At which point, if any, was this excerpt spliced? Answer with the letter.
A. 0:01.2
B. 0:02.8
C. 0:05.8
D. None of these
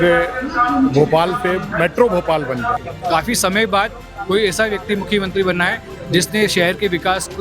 B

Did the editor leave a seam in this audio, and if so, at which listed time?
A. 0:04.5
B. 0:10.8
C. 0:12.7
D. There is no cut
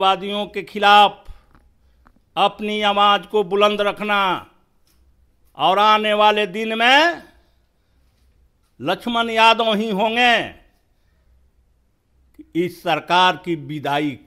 D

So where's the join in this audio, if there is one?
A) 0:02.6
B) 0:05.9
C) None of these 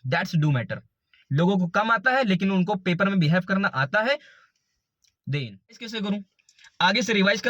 B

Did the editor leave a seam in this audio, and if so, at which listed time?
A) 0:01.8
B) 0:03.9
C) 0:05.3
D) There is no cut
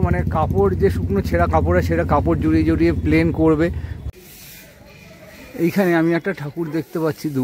B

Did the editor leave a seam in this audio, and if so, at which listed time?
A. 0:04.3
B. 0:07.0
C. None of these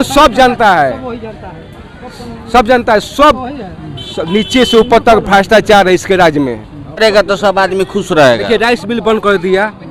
B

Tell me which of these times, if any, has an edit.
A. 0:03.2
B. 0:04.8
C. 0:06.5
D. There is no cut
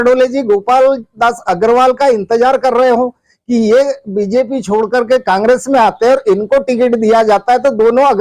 D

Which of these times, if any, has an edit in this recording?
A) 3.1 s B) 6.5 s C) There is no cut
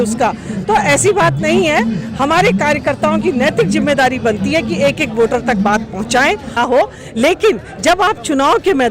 B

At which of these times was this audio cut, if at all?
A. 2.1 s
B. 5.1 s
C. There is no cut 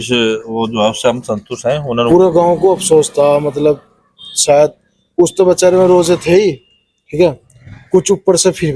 A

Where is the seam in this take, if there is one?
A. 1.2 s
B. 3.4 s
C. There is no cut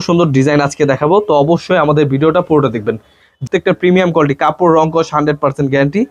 B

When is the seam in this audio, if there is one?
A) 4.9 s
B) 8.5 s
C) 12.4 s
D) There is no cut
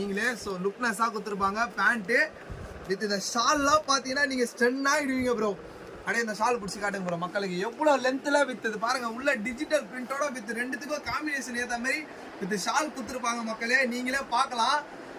D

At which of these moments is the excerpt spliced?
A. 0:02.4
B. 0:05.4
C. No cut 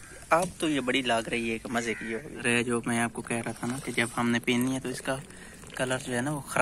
A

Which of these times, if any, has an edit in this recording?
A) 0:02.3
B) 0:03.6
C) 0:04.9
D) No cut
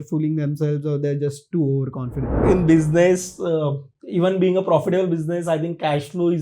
A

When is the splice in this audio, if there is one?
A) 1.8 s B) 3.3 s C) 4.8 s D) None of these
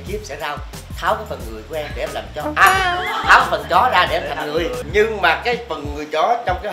C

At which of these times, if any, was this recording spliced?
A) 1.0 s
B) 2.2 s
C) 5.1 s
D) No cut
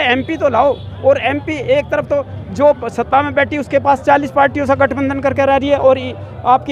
D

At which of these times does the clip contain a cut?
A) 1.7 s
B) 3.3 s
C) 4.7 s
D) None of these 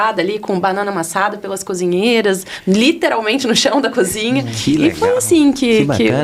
D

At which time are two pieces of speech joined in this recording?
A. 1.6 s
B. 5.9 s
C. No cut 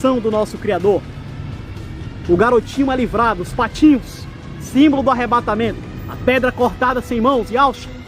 B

